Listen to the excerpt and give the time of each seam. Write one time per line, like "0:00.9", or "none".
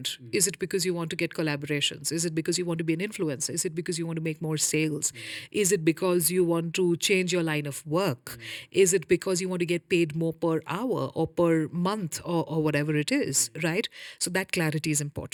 none